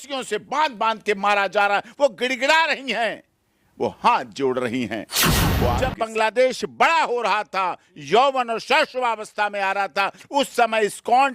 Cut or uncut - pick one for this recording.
cut